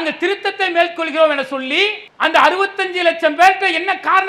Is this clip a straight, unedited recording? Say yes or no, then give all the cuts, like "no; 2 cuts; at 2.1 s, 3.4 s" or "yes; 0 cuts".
no; 1 cut; at 2.0 s